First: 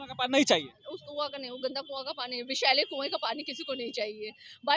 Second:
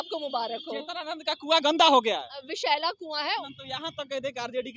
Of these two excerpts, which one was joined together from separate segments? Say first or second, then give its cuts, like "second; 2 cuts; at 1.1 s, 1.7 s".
second; 1 cut; at 3.6 s